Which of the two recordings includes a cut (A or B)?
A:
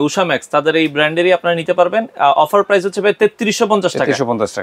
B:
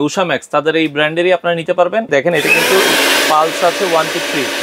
B